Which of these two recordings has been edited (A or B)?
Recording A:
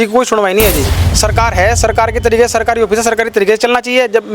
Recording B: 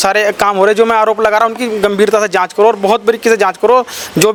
A